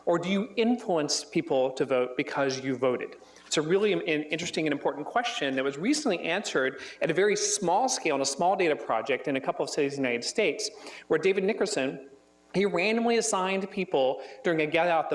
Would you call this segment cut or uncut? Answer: uncut